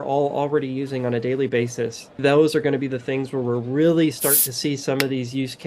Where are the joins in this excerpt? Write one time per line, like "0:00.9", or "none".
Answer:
0:02.2